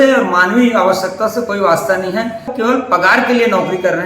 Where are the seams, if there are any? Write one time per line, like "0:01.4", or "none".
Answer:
0:02.5